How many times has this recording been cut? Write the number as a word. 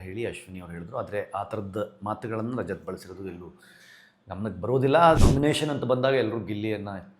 one